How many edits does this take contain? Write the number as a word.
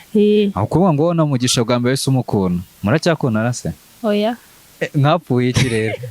two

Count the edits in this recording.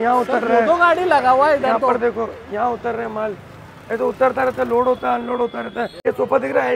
one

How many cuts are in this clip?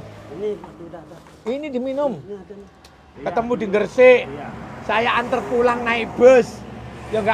one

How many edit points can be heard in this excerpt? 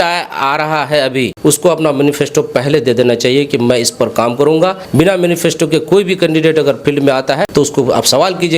three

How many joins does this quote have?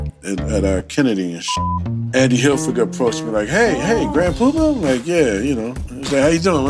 one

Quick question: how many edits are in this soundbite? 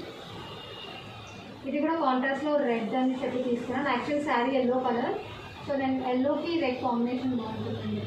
zero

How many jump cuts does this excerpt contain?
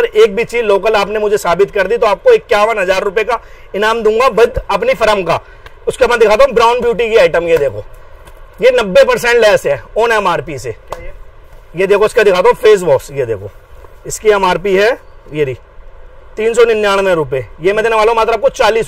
zero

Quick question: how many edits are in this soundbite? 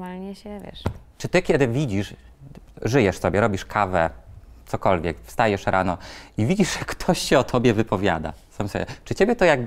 one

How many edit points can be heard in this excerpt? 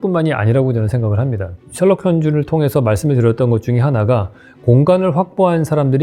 zero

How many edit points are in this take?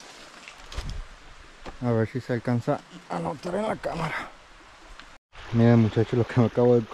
one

